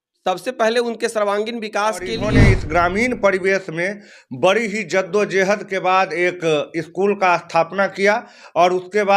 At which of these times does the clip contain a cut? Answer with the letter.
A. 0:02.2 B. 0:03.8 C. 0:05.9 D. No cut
A